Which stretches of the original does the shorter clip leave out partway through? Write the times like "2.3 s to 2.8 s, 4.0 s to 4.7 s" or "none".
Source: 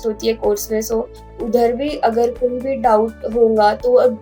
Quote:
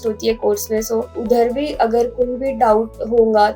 1.1 s to 1.4 s